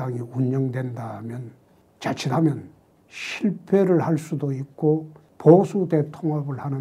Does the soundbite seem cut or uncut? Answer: uncut